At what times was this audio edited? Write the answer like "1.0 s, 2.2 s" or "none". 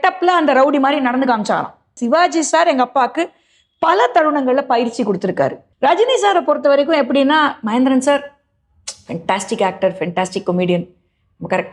1.9 s, 5.6 s